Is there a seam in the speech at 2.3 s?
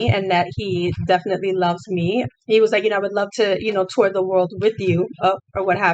yes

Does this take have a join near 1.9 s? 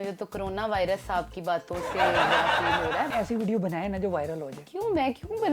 yes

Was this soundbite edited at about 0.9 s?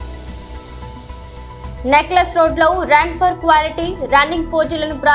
no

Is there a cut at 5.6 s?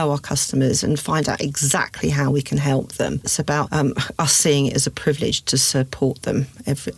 no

